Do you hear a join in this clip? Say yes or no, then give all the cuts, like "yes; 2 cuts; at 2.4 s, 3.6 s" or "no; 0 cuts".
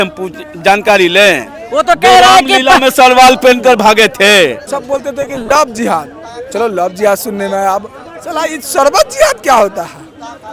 yes; 1 cut; at 4.7 s